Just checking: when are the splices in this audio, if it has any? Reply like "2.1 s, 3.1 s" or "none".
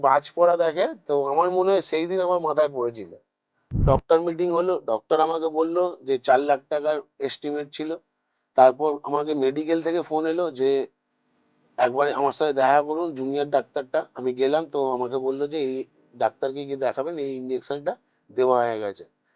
3.7 s

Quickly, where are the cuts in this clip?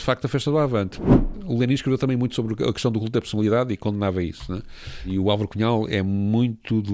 1.1 s

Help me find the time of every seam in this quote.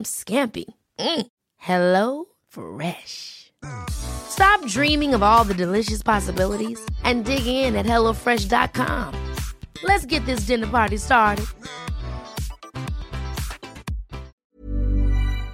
14.4 s

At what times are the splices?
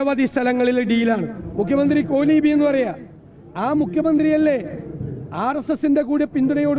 1.4 s

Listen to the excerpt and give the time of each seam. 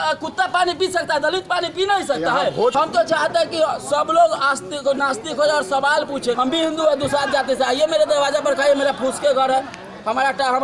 2.7 s, 6.4 s

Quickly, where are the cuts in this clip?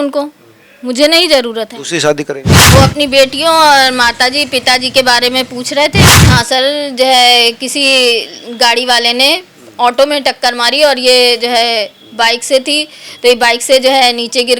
2.5 s, 6.1 s

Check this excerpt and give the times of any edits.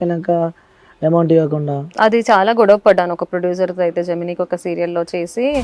none

